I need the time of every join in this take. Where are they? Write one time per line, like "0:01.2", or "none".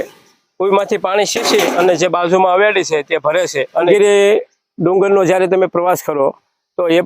0:03.9